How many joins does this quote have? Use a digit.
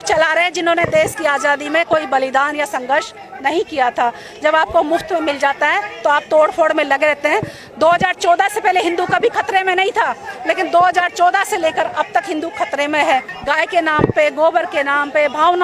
1